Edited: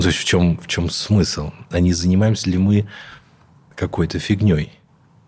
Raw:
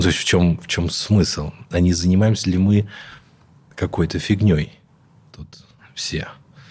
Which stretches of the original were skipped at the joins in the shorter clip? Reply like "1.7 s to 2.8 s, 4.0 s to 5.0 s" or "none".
none

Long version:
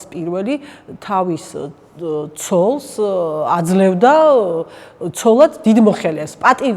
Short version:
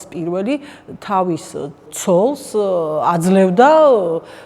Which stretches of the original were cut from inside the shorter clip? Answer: 1.9 s to 2.3 s

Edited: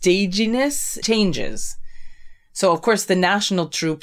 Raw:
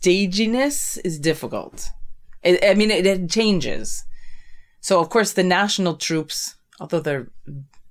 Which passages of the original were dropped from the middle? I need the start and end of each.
1.0 s to 3.3 s

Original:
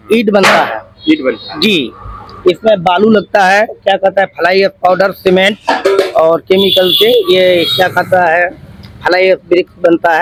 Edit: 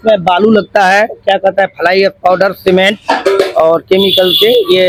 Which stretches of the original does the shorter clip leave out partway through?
none

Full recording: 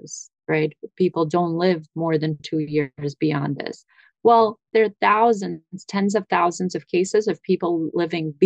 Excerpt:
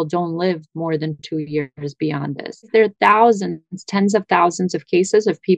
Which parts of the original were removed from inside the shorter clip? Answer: 3.8 s to 4.6 s

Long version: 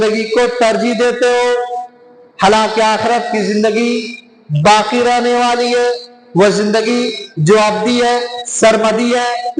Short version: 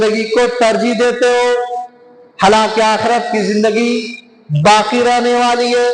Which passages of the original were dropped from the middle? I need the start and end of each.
none

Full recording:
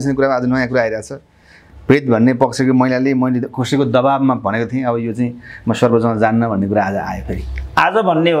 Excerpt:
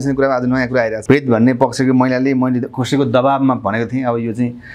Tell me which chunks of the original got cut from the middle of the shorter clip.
1.0 s to 1.8 s

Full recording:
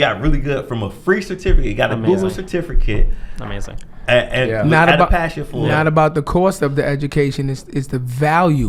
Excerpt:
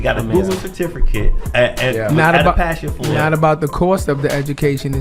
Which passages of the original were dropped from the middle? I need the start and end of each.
3.1 s to 3.9 s

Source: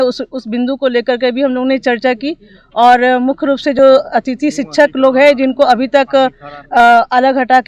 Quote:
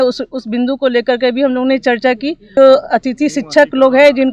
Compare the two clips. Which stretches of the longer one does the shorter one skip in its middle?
2.5 s to 3.7 s

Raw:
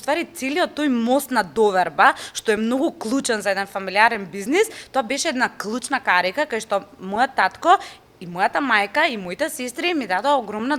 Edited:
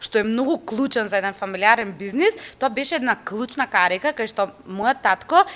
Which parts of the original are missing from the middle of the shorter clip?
none

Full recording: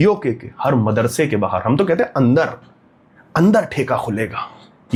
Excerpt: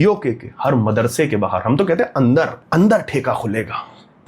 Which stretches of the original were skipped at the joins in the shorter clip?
2.6 s to 3.2 s

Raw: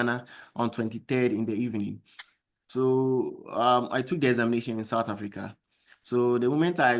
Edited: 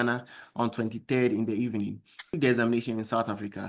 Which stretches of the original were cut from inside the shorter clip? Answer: 2.3 s to 4.1 s

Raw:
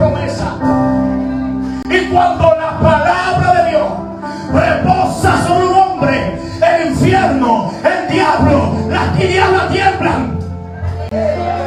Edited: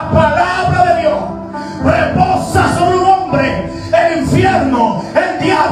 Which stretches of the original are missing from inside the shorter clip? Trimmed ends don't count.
none

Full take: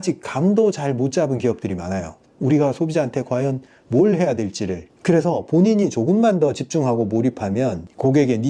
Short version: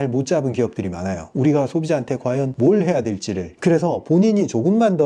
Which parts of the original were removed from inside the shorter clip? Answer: 2.1 s to 2.3 s, 3.6 s to 3.8 s, 4.8 s to 4.9 s

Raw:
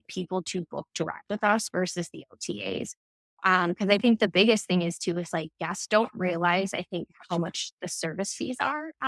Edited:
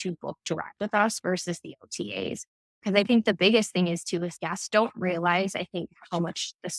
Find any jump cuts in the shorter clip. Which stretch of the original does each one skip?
3.3 s to 3.8 s, 5.3 s to 5.5 s

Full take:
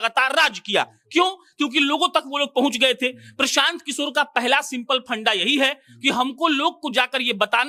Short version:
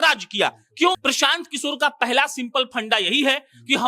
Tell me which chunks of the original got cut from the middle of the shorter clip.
1.3 s to 3.3 s

